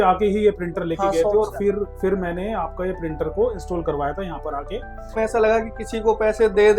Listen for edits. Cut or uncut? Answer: cut